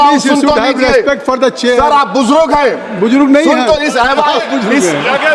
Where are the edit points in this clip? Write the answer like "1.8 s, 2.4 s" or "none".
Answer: none